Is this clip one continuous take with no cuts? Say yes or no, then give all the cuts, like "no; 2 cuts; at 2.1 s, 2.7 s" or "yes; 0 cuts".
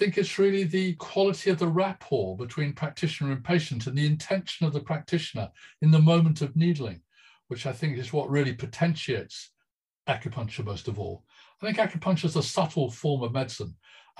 no; 1 cut; at 1.0 s